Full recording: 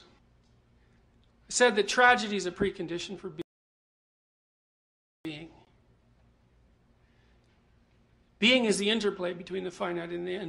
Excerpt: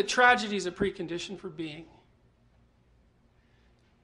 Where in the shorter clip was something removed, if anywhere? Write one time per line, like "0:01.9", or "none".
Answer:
0:01.8